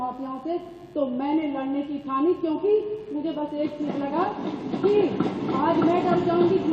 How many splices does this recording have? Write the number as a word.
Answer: zero